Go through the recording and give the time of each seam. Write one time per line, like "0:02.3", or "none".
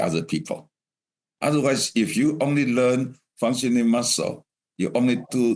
none

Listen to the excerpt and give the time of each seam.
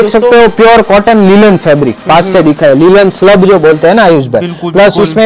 none

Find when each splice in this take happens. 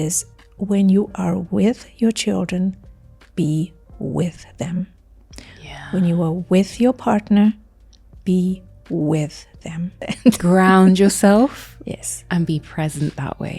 0:10.0

